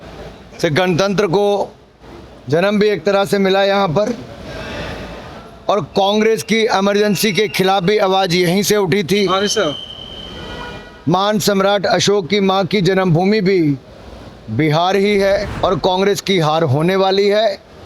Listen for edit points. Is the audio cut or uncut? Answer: cut